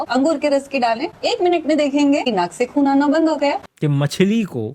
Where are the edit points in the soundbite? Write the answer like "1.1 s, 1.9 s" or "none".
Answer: 3.7 s